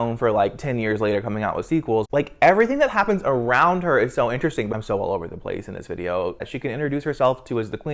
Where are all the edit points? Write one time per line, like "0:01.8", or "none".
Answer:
0:02.1
0:04.7
0:06.5